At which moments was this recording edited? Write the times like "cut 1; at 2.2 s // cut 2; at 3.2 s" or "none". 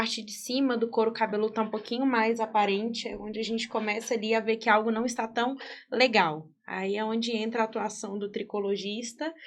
none